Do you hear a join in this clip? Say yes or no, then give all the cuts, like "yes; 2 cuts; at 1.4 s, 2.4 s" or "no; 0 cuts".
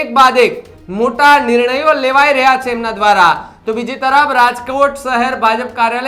no; 0 cuts